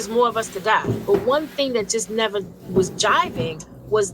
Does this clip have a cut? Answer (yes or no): yes